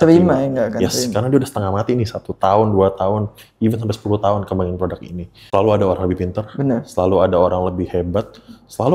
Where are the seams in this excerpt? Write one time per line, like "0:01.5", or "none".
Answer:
0:05.3